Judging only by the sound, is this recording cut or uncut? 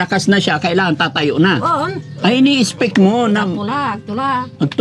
uncut